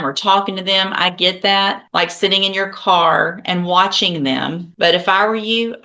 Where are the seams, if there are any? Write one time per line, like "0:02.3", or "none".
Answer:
0:01.8
0:04.7